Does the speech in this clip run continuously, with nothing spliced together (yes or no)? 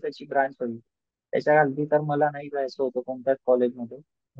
yes